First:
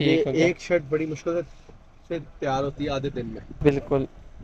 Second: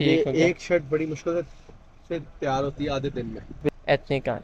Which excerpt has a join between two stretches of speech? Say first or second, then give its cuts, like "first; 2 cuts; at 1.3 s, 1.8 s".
second; 1 cut; at 3.5 s